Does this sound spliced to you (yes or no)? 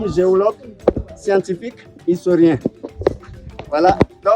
no